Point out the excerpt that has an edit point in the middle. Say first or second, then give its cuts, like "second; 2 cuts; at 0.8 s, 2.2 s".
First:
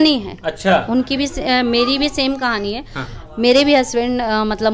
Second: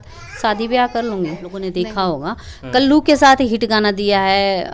second; 1 cut; at 1.5 s